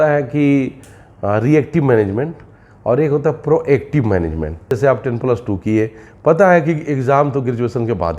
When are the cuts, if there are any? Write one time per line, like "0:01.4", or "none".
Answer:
0:04.7